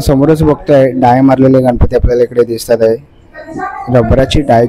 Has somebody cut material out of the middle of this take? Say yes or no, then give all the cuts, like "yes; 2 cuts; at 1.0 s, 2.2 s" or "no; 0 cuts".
no; 0 cuts